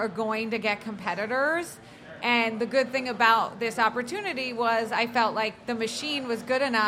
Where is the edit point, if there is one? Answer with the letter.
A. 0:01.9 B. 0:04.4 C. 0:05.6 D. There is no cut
D